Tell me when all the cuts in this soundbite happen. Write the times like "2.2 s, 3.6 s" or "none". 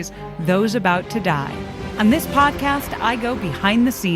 1.8 s